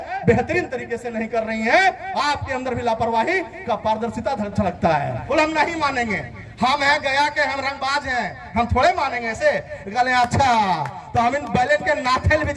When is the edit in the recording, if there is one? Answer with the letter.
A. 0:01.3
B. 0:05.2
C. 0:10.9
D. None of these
B